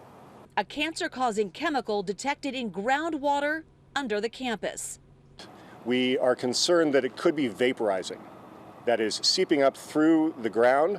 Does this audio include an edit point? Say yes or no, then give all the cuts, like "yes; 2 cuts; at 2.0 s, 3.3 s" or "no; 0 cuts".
no; 0 cuts